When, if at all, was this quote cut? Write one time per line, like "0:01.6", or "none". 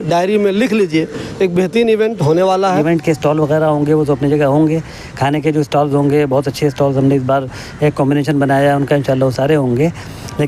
0:02.8